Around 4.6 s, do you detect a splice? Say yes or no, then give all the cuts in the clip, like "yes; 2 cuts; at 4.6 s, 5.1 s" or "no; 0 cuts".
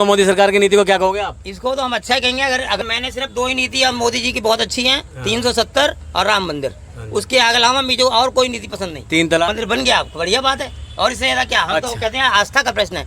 no; 2 cuts; at 2.8 s, 9.5 s